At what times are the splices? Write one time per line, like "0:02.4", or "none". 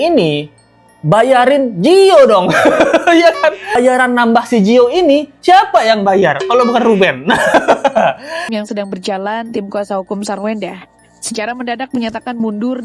0:03.8
0:08.5